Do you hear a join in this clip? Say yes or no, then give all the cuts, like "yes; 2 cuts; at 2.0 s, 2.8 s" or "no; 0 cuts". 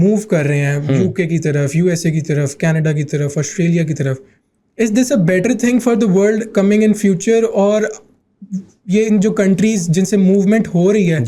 no; 0 cuts